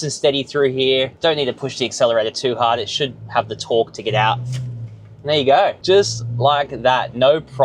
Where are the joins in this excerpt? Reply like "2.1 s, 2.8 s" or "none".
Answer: 5.8 s